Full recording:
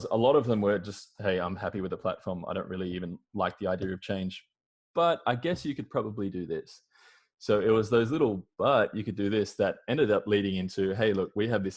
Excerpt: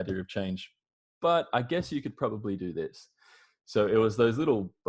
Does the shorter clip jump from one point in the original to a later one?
no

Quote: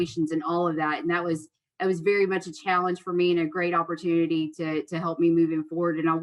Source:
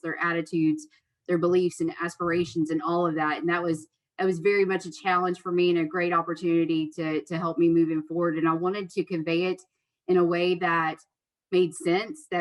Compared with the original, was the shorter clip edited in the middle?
no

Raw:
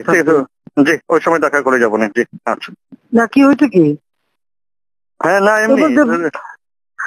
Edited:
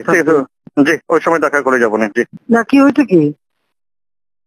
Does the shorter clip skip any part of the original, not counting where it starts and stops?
yes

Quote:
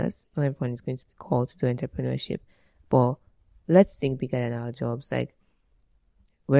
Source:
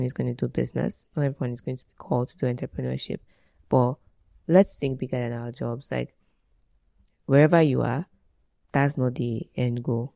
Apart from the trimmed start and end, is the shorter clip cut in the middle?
no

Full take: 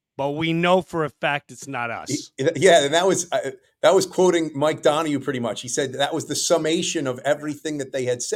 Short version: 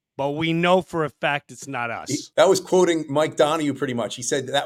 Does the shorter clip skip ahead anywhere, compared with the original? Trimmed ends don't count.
yes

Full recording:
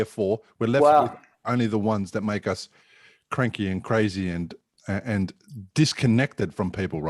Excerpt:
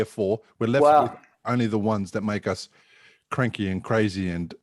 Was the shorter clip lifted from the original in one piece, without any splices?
yes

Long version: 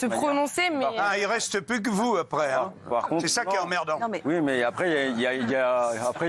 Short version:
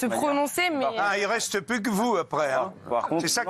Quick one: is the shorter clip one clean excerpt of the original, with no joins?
yes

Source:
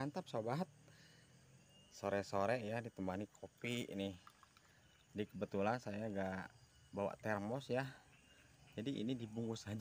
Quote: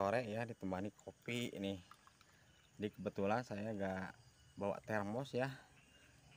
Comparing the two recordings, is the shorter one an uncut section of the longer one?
yes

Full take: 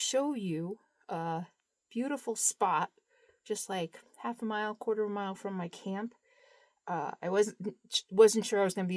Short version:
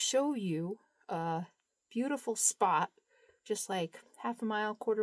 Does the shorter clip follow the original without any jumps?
yes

